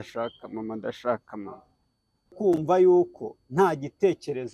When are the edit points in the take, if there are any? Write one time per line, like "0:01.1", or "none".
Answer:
0:02.3